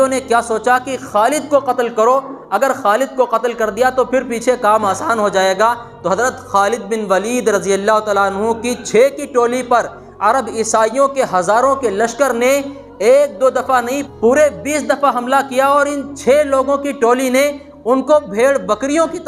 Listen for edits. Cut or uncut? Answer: cut